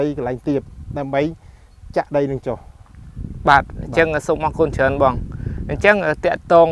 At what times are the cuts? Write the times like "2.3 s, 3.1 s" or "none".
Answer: none